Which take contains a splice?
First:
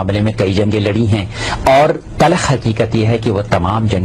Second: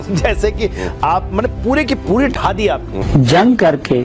second; 1 cut; at 2.9 s

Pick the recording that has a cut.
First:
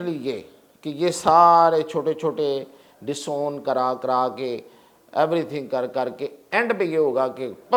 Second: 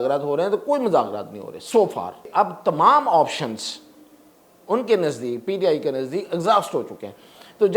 second; 1 cut; at 2.3 s

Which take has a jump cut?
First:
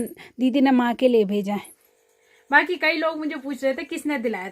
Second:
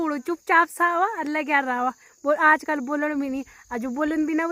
first; 1 cut; at 2.3 s

